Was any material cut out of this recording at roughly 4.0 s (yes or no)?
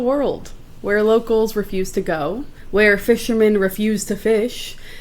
no